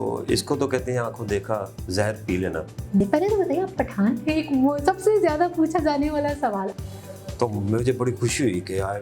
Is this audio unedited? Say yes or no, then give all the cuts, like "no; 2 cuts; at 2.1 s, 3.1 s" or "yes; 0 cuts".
no; 2 cuts; at 3.0 s, 6.8 s